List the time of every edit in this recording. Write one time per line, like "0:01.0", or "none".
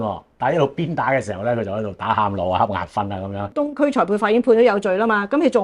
0:03.6